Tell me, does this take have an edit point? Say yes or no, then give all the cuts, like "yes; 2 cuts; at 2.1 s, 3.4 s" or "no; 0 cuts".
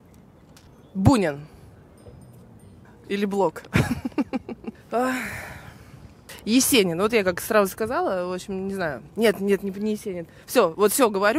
yes; 1 cut; at 2.8 s